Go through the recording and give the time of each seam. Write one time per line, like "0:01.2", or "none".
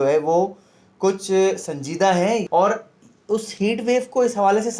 0:02.4